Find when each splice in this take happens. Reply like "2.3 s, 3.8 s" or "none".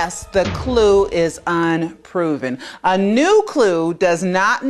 none